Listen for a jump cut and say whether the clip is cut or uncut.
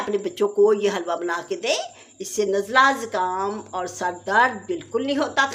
uncut